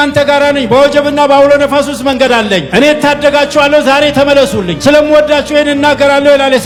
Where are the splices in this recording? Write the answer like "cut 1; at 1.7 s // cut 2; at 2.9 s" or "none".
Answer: none